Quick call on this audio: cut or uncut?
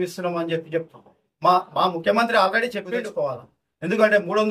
cut